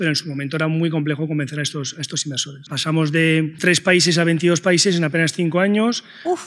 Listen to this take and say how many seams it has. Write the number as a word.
two